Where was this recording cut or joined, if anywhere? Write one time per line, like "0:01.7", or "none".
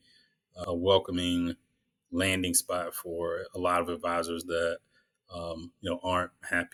none

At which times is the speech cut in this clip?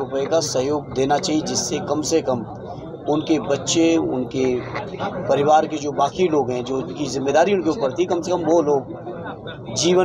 none

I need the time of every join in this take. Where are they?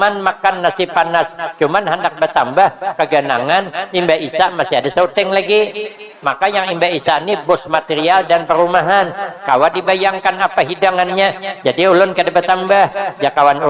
none

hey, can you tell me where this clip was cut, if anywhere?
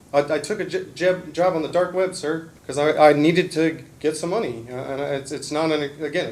0:02.6

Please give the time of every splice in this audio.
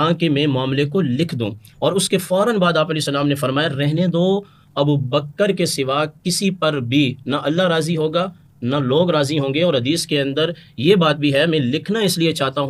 none

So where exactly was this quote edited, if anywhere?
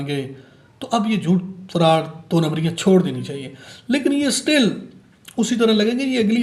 none

